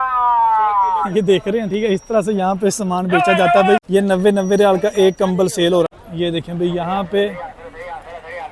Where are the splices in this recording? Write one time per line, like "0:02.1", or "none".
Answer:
0:03.8
0:05.9